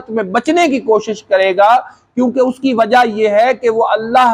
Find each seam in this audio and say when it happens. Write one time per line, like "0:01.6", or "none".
none